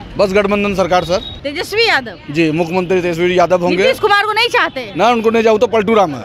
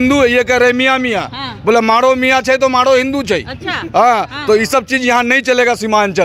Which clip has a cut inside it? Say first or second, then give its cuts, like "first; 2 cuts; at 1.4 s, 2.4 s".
first; 1 cut; at 1.3 s